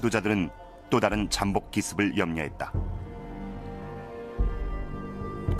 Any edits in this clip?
no; 0 cuts

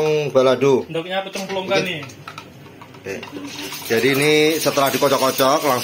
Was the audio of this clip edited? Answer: no; 0 cuts

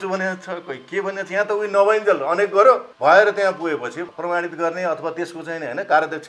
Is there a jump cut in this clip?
yes; 2 cuts; at 2.9 s, 4.1 s

